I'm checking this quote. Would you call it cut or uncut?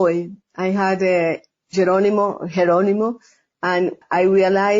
cut